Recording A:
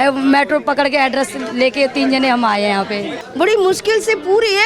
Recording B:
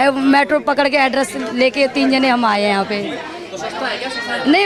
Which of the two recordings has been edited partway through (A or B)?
A